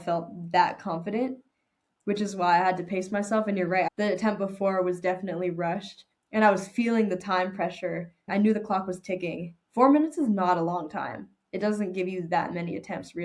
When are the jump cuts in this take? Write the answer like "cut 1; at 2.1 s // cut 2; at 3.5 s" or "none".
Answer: cut 1; at 3.9 s // cut 2; at 8.2 s

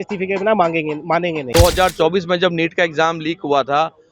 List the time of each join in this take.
cut 1; at 1.4 s

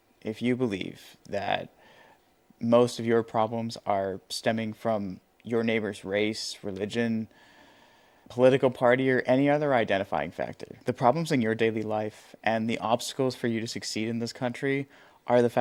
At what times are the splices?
none

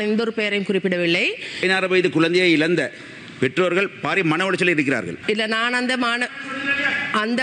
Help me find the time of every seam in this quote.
cut 1; at 1.6 s // cut 2; at 5.1 s

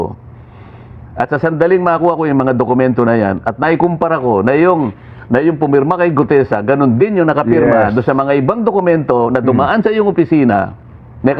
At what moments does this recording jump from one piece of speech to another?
none

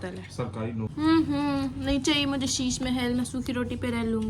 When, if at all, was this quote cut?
cut 1; at 0.9 s

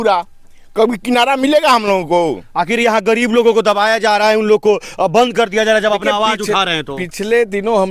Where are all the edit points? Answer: none

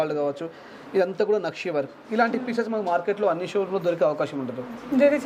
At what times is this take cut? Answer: none

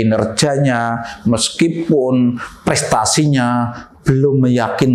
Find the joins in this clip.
none

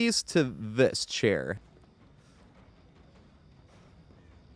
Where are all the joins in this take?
cut 1; at 1.6 s

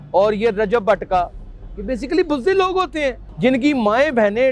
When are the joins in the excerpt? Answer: cut 1; at 3.3 s

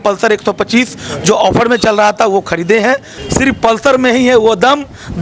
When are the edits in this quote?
cut 1; at 3.2 s

